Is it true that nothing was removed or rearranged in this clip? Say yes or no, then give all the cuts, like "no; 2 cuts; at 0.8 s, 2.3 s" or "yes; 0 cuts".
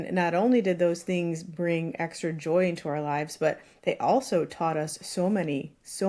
yes; 0 cuts